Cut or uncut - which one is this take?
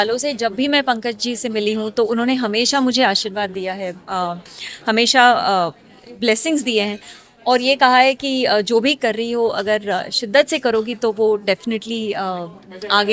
uncut